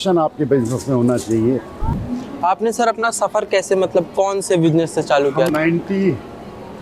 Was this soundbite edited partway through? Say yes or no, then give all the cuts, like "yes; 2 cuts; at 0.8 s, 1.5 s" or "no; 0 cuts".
yes; 2 cuts; at 1.8 s, 5.5 s